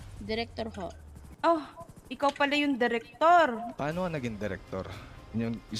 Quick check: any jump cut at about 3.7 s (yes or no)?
yes